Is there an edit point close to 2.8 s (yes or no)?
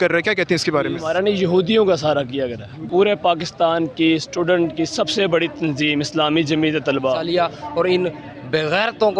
yes